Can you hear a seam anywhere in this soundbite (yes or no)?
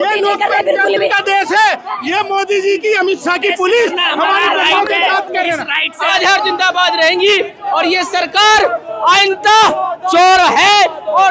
yes